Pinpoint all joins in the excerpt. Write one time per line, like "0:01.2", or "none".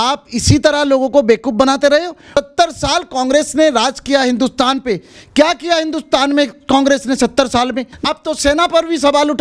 0:02.2
0:08.1